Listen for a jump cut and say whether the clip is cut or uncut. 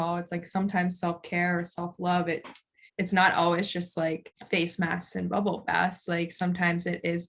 cut